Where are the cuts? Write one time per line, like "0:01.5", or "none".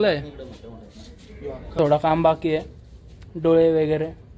0:01.8